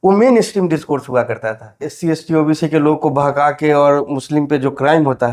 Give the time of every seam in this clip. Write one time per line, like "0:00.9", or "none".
0:01.9